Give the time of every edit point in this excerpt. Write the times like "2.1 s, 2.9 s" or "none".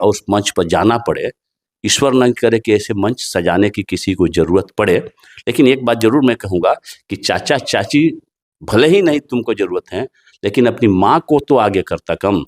none